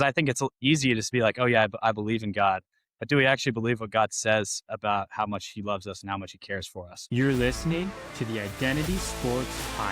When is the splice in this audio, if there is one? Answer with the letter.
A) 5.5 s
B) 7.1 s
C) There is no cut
B